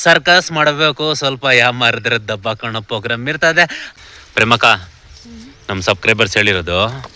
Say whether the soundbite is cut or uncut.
cut